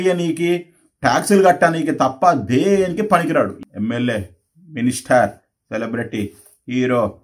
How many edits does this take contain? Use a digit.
1